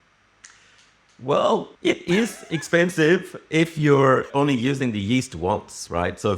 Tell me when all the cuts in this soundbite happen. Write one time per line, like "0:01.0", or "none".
0:01.7